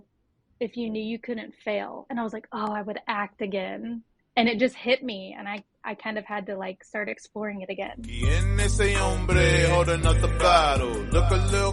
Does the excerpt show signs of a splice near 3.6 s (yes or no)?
no